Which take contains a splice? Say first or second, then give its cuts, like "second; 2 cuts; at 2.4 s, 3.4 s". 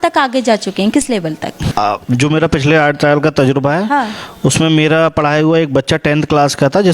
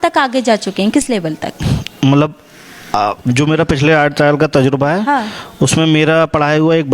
first; 1 cut; at 1.5 s